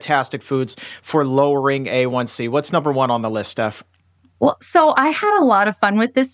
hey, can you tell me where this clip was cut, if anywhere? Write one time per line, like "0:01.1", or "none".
none